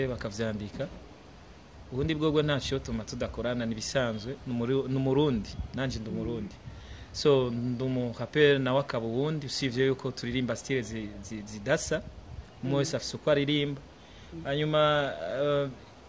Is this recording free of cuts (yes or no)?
yes